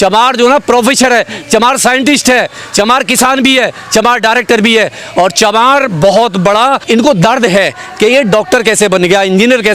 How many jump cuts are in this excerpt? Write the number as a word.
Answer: one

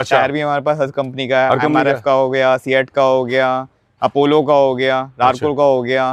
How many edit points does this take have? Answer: zero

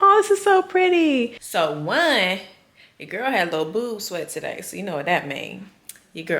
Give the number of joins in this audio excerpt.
one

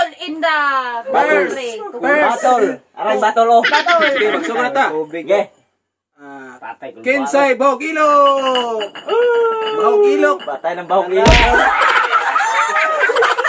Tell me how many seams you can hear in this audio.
one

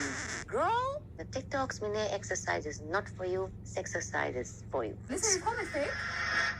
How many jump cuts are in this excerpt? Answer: two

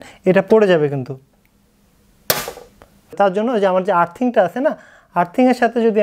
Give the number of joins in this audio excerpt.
one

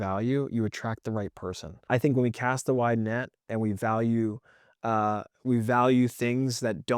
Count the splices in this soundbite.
one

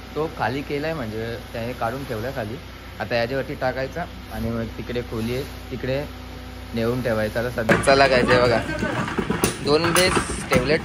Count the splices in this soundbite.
one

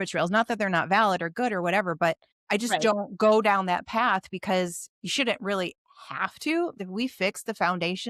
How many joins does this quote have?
two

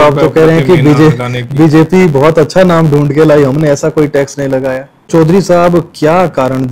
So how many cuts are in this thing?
one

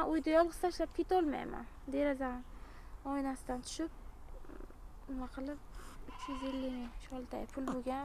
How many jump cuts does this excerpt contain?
zero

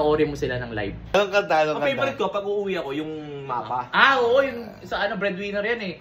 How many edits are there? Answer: one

